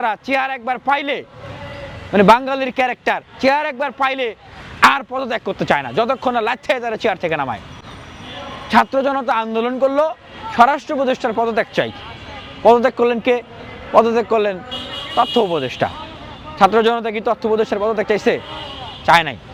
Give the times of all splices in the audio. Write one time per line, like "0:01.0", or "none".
none